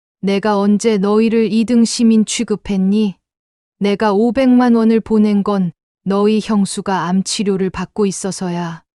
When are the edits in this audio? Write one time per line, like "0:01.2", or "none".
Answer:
none